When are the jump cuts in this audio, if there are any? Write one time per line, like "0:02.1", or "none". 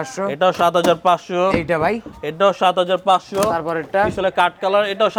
none